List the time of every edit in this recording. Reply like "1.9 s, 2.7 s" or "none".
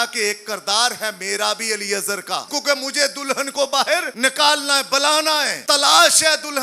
2.5 s, 4.1 s, 5.5 s